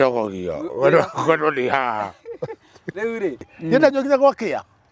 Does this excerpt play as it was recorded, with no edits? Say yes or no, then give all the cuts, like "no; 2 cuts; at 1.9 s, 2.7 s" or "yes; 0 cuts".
no; 1 cut; at 3.5 s